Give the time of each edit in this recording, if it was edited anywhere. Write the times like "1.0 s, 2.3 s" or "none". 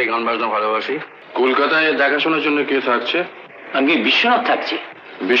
1.2 s